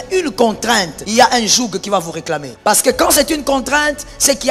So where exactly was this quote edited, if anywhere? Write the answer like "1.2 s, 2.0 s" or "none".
1.0 s, 2.5 s